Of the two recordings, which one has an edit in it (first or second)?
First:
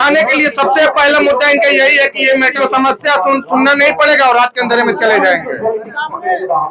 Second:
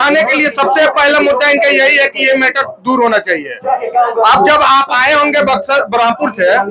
first